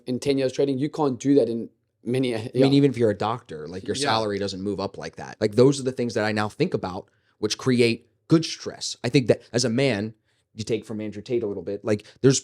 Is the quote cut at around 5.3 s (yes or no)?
yes